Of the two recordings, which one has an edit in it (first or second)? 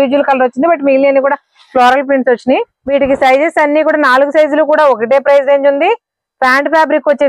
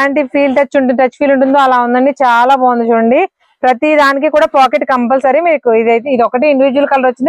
first